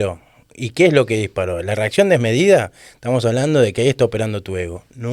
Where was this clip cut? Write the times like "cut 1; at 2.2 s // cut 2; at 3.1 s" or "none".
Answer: none